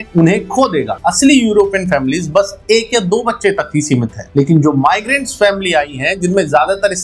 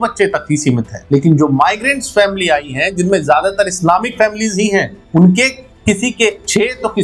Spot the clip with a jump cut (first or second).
first